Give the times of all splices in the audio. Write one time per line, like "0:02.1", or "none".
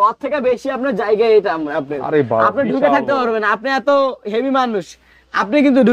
none

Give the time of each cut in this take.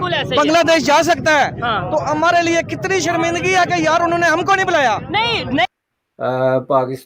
0:05.7

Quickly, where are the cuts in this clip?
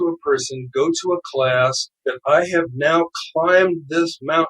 0:01.9

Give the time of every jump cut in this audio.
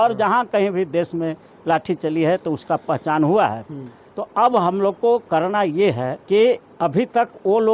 0:06.1
0:06.7

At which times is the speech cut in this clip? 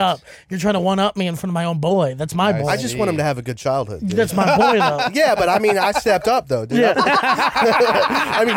0:07.0

